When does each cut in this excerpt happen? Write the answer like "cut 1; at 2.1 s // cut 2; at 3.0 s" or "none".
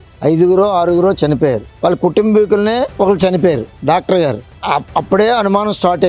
cut 1; at 1.7 s // cut 2; at 2.9 s